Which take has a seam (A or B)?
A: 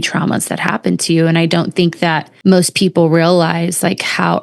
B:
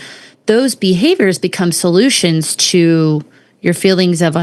A